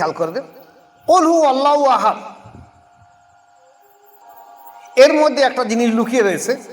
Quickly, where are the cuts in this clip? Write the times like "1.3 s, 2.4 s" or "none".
4.2 s